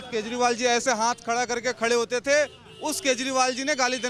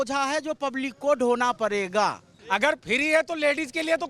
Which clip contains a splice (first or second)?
second